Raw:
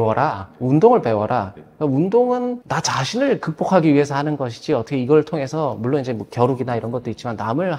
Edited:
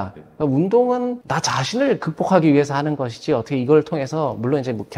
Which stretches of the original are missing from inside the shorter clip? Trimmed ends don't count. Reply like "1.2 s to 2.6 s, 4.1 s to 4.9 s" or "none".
none